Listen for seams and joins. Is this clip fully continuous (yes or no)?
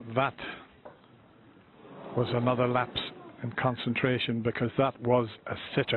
no